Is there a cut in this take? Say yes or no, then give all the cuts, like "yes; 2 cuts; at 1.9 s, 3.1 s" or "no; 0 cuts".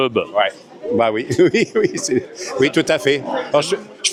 no; 0 cuts